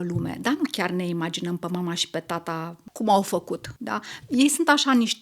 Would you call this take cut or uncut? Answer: cut